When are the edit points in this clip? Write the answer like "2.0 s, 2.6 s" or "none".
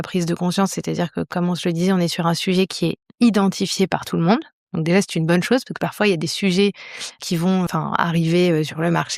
7.2 s